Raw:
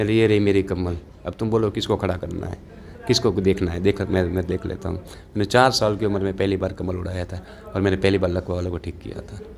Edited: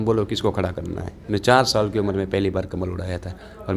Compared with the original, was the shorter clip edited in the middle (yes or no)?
yes